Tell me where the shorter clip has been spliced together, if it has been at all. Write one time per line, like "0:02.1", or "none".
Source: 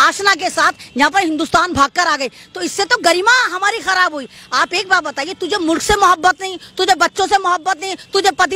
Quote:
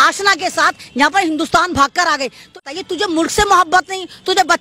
0:02.6